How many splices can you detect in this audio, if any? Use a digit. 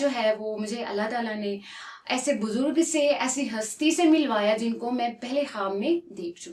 0